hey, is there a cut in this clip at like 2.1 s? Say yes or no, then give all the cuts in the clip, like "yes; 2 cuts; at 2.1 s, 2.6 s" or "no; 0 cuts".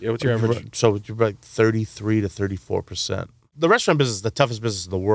no; 1 cut; at 3.4 s